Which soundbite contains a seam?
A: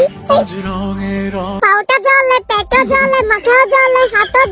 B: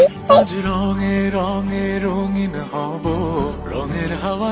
A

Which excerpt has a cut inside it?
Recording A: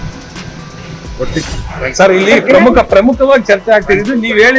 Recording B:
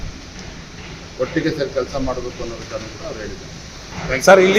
A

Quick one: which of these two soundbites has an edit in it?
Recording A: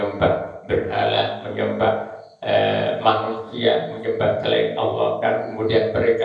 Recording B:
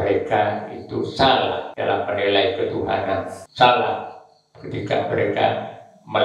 B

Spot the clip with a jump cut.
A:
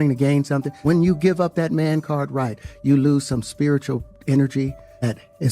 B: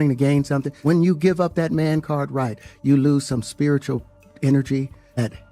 A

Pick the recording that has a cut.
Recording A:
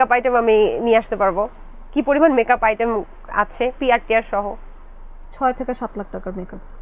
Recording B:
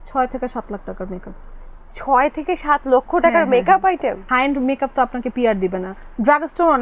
B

